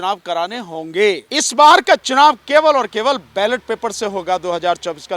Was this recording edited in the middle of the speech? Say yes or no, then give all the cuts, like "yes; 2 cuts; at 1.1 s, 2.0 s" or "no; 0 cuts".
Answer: yes; 1 cut; at 1.2 s